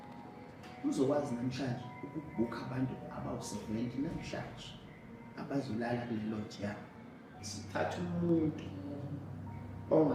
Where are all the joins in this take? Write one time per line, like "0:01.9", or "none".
0:07.3